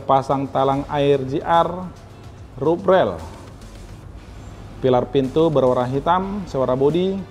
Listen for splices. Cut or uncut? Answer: uncut